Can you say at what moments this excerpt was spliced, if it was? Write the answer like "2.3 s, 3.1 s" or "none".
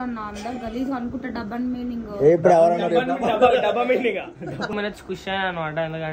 4.7 s